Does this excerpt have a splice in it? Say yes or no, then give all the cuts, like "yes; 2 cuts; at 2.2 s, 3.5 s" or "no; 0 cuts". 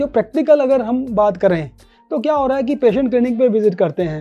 no; 0 cuts